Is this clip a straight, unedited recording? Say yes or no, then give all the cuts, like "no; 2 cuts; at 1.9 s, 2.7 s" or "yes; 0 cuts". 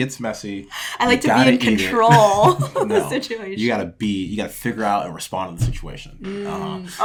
yes; 0 cuts